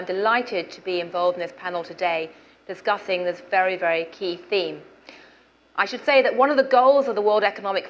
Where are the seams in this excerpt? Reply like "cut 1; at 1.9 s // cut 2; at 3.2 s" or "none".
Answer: none